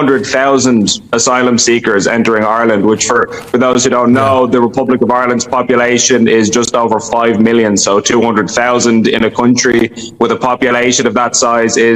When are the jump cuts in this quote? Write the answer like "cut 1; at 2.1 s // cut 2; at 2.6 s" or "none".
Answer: none